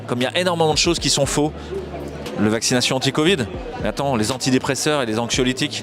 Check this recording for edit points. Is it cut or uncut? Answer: uncut